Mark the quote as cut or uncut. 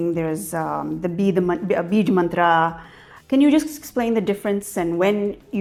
uncut